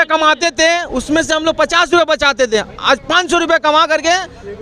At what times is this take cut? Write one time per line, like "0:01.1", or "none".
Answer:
none